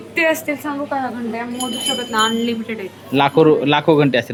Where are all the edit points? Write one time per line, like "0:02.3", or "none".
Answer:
none